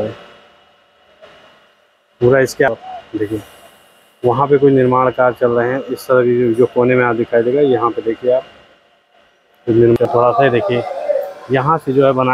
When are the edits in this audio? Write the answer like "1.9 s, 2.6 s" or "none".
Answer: 10.1 s